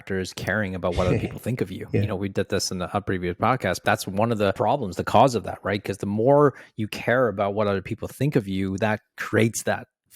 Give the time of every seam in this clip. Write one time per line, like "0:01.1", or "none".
0:03.8
0:04.6

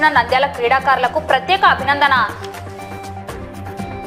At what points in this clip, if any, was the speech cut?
0:02.3

